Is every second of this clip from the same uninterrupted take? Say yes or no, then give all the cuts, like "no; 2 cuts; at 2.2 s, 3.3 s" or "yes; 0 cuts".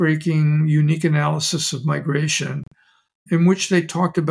yes; 0 cuts